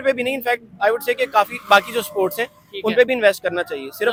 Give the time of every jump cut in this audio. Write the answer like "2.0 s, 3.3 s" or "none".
none